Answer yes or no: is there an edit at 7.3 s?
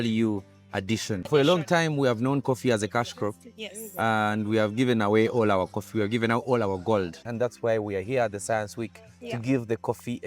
yes